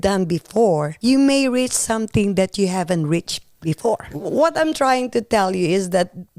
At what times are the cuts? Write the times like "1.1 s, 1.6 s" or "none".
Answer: 0.9 s, 3.9 s